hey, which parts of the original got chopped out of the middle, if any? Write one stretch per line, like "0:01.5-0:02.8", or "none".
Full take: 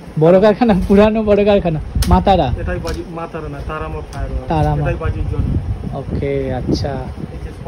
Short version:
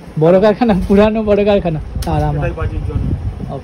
0:01.9-0:04.3

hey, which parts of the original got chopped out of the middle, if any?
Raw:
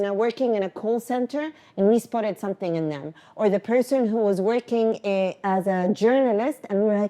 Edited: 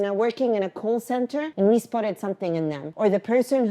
0:01.5-0:01.7
0:03.0-0:03.2

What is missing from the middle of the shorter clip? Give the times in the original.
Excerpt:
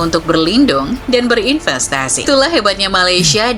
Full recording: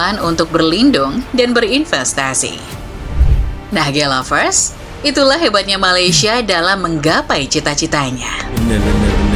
0:02.5-0:05.1

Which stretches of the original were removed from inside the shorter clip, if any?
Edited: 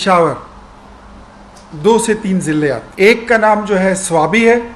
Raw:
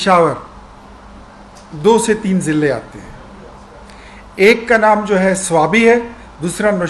0:02.9-0:04.3

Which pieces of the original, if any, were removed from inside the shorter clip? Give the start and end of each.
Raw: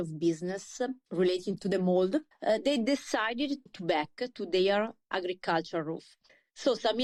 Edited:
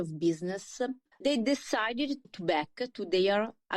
0:01.2-0:02.6

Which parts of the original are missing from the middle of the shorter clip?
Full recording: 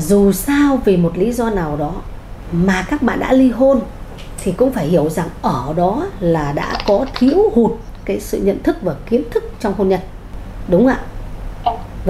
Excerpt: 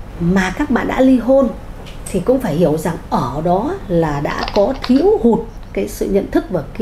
none

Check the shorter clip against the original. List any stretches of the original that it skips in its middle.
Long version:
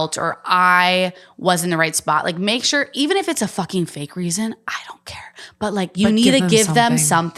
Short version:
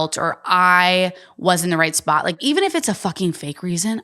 0:02.4-0:02.9

